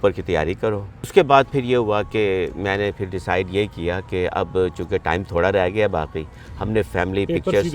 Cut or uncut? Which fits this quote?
cut